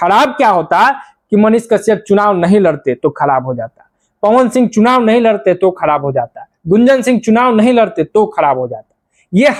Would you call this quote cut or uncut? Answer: uncut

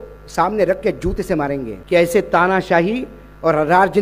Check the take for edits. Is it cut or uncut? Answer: cut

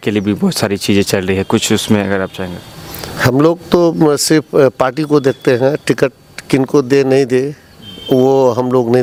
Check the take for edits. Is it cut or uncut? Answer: uncut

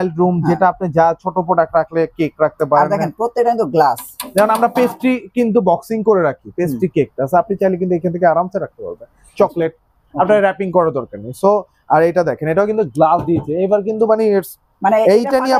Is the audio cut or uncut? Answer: uncut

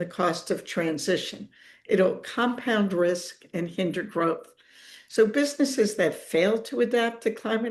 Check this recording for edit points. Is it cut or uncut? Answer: uncut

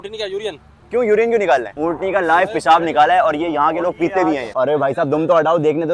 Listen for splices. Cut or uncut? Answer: cut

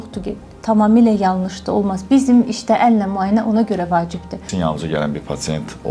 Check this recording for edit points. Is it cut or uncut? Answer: cut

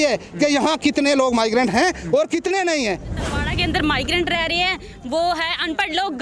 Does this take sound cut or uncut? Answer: cut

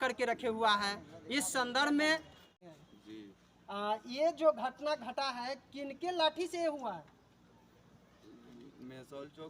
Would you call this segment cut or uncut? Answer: cut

